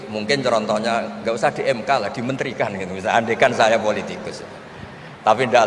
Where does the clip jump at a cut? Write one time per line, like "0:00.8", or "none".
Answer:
none